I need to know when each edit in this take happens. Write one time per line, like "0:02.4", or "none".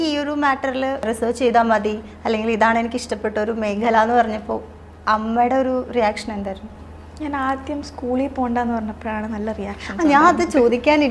0:01.0